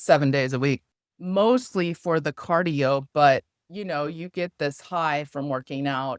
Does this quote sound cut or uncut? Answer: cut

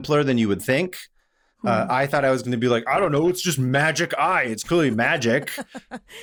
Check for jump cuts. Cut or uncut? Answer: uncut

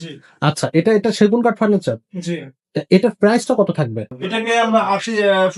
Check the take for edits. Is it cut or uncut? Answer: cut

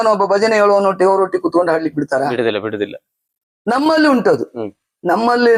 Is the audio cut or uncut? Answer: uncut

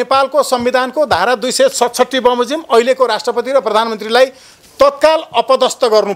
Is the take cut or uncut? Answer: uncut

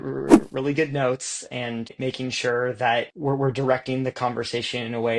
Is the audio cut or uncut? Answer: cut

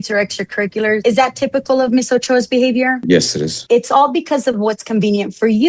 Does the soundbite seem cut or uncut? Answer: cut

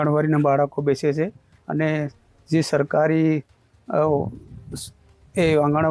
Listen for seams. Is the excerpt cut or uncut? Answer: uncut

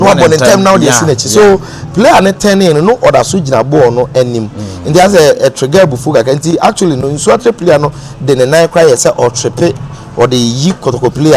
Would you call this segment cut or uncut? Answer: uncut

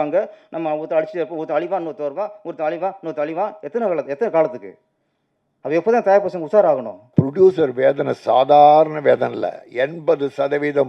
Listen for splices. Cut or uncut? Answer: cut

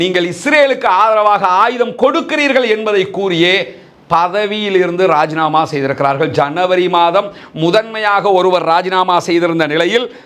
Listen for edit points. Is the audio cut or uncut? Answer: uncut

